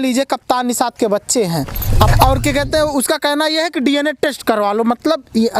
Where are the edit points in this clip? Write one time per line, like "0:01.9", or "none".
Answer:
0:02.1

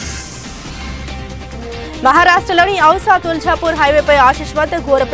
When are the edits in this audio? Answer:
0:01.3

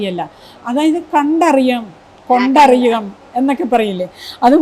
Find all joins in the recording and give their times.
none

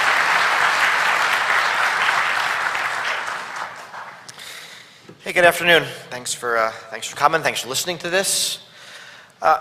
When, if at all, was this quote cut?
none

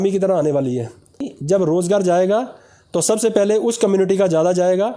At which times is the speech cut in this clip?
0:01.3

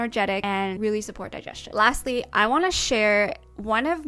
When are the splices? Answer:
none

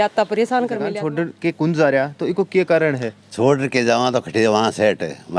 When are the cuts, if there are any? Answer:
0:00.9

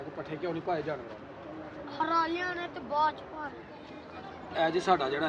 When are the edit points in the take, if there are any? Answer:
0:04.2

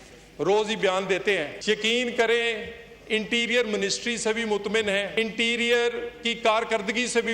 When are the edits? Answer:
0:01.5
0:05.1

